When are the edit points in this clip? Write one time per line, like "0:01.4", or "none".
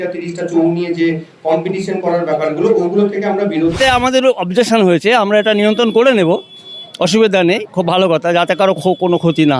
0:03.8